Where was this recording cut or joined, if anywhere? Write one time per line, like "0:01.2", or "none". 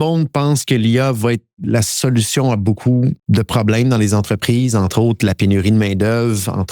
0:03.2